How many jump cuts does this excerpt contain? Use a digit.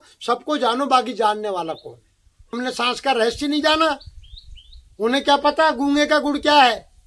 1